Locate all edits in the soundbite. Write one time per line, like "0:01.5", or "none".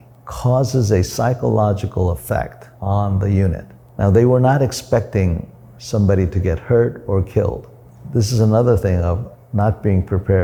none